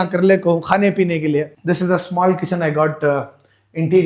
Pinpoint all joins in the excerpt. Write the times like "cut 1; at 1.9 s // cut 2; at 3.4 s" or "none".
cut 1; at 1.5 s